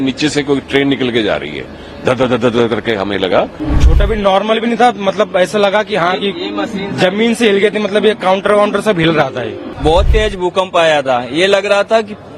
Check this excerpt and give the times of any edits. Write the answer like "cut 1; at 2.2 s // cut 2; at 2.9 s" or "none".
cut 1; at 3.6 s // cut 2; at 9.6 s